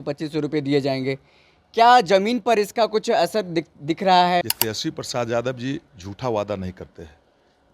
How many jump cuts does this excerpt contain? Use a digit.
1